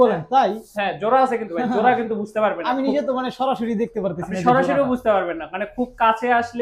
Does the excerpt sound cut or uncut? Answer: uncut